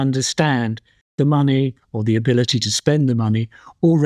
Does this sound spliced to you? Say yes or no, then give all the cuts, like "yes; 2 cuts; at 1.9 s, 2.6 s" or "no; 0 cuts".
yes; 1 cut; at 1.2 s